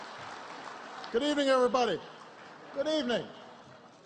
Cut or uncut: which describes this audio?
uncut